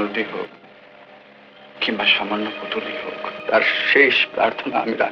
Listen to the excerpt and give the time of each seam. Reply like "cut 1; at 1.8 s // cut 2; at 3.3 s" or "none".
cut 1; at 3.4 s